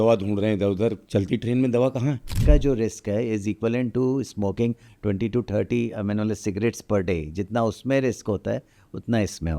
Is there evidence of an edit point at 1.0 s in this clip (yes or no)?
yes